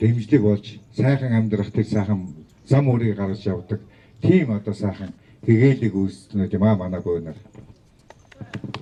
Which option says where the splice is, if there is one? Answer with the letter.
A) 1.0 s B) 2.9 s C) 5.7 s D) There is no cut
D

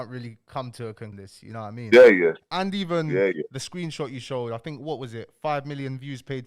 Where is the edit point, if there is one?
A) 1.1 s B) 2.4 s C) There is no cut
A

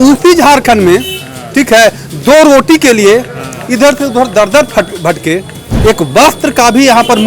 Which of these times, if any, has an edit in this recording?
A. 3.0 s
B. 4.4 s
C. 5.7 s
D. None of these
C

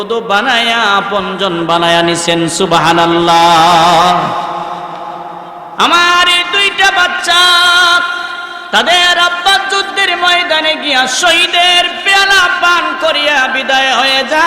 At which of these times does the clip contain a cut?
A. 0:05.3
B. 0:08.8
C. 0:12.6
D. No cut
A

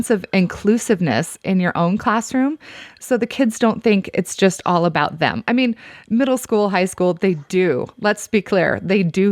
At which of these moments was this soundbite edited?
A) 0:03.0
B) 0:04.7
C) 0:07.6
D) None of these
D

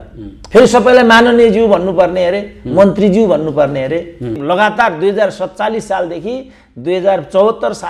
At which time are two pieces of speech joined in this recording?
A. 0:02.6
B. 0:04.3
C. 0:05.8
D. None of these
B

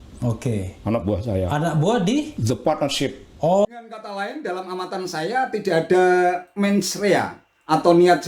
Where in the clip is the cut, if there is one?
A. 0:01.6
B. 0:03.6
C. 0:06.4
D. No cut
B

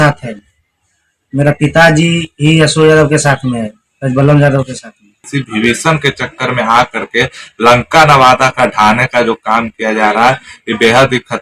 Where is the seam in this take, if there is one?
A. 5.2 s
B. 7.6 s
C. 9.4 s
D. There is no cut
A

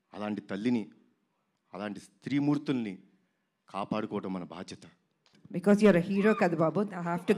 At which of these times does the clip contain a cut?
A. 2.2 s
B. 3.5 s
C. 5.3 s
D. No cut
C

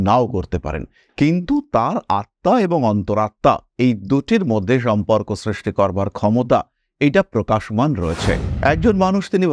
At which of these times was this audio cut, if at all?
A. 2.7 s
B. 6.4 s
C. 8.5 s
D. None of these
C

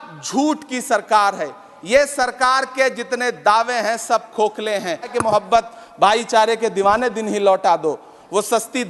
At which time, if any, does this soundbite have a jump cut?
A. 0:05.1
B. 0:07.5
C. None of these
A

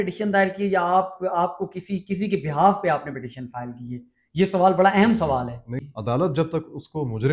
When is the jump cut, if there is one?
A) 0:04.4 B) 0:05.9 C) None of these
B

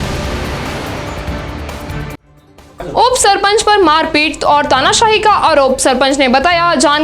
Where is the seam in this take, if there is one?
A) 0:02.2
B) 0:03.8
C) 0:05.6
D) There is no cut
A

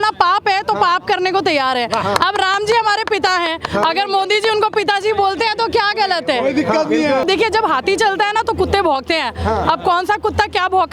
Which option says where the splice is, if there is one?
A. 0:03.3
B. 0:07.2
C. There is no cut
B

